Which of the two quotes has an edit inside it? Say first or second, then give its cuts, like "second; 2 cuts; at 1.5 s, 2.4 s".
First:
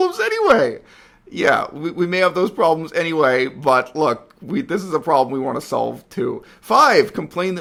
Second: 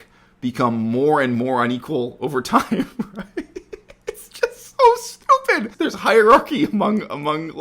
second; 1 cut; at 5.7 s